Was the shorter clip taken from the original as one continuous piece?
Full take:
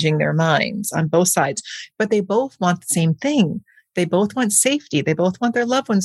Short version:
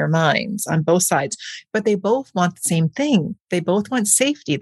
no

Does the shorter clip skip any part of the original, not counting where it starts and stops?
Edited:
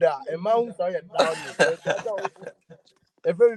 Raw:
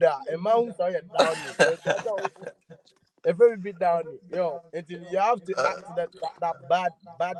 no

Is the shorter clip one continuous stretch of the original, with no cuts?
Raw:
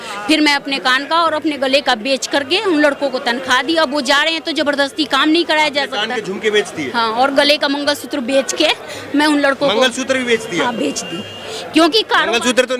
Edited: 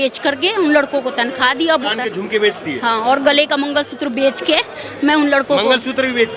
no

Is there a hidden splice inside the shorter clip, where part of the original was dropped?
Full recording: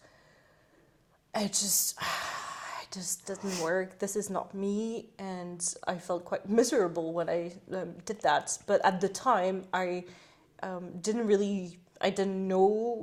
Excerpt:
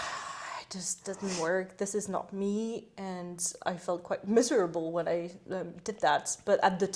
no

